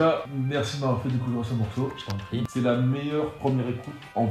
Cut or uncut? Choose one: cut